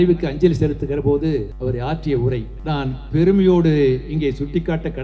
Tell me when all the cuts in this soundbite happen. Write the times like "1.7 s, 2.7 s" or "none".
1.5 s, 2.5 s